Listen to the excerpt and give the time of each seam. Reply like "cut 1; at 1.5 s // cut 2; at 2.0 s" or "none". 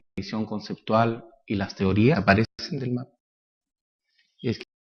none